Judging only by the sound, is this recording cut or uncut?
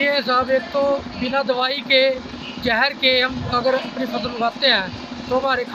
uncut